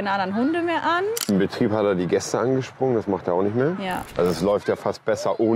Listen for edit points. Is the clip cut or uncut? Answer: cut